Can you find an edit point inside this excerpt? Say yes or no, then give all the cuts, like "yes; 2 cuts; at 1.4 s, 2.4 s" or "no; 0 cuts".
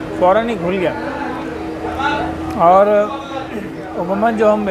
no; 0 cuts